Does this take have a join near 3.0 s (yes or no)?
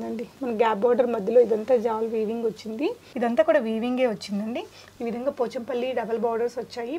yes